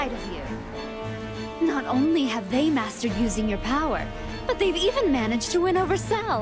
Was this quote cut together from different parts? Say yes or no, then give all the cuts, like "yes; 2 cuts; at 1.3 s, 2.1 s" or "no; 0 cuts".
yes; 1 cut; at 3.7 s